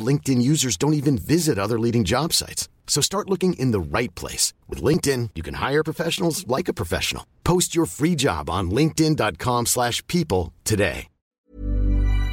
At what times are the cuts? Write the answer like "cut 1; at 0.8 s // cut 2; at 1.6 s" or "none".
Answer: cut 1; at 11.3 s